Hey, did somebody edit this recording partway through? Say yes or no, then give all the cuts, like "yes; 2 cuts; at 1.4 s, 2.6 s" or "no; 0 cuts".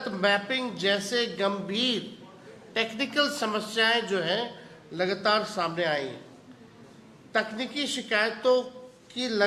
no; 0 cuts